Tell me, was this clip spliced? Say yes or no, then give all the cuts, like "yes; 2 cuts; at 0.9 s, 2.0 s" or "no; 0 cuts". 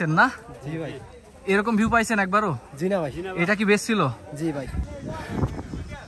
yes; 1 cut; at 4.9 s